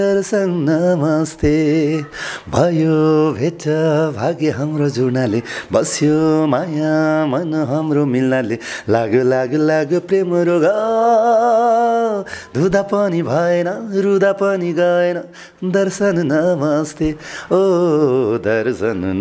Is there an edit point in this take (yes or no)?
no